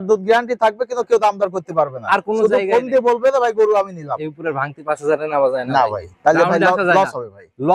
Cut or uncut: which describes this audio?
uncut